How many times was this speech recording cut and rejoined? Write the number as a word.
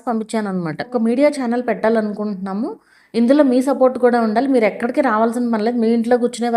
one